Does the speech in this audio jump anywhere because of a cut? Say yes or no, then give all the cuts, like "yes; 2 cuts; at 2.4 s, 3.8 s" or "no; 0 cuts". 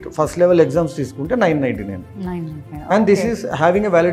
no; 0 cuts